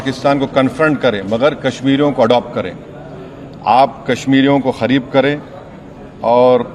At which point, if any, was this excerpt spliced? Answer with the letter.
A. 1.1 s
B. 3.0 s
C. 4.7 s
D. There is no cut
D